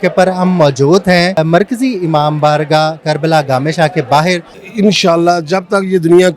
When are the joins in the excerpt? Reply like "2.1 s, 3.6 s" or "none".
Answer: 1.4 s, 4.6 s